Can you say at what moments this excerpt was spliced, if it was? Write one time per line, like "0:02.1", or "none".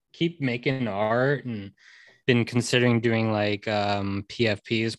0:02.1